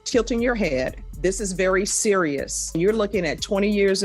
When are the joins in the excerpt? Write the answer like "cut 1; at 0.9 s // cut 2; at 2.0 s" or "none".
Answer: cut 1; at 1.0 s // cut 2; at 2.8 s